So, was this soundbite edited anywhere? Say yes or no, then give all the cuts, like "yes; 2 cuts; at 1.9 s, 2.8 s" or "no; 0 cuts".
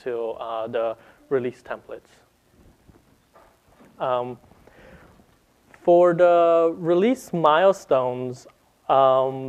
no; 0 cuts